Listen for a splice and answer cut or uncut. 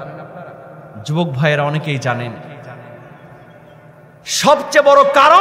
uncut